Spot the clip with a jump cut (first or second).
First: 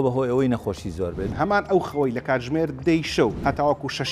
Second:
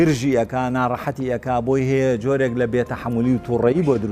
first